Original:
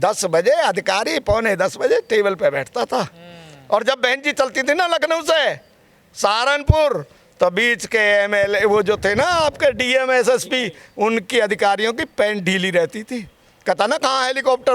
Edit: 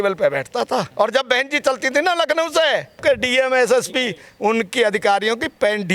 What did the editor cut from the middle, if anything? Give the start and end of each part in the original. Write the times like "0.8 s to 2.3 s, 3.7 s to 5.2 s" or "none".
3.1 s to 3.6 s, 5.7 s to 9.6 s